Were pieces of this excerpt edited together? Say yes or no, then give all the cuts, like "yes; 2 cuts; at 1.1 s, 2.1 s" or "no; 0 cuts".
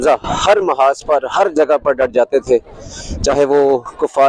no; 0 cuts